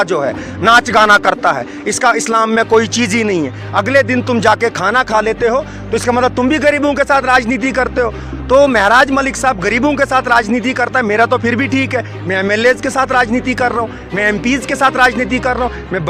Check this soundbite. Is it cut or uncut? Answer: uncut